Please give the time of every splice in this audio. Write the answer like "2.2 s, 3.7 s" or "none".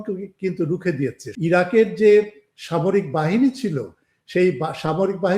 1.3 s